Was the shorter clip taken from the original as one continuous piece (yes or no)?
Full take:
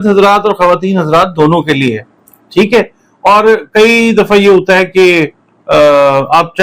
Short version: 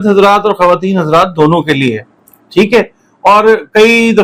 yes